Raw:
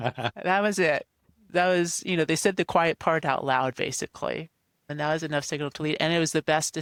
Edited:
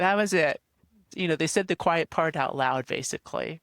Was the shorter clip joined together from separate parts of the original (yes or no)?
yes